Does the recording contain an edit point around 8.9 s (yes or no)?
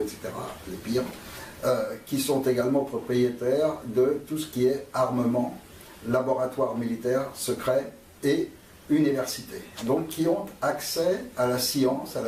no